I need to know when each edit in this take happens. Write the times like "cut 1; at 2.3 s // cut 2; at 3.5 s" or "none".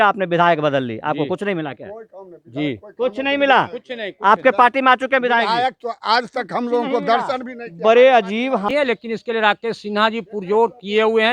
cut 1; at 8.6 s